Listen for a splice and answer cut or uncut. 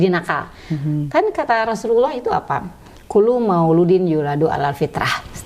uncut